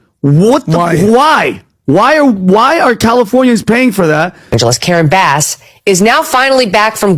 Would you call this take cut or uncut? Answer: cut